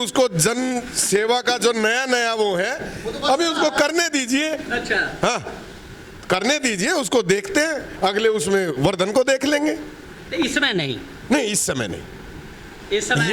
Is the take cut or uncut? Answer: uncut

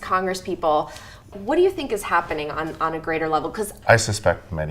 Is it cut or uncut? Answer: cut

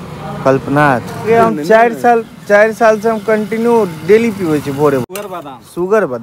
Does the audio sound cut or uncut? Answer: cut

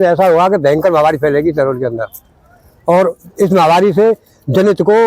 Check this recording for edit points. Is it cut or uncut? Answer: uncut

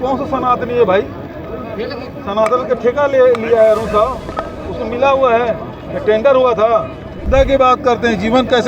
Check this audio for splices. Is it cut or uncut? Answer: cut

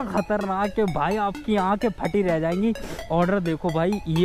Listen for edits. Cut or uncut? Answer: cut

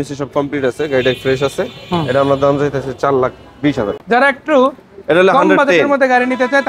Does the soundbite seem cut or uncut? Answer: cut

